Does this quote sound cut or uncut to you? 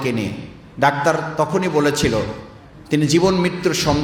uncut